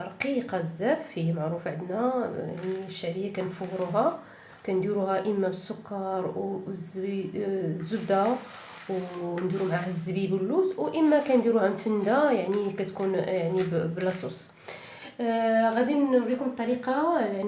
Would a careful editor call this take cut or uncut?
uncut